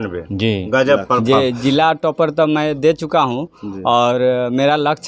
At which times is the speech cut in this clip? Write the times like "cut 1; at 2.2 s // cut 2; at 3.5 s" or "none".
cut 1; at 1.2 s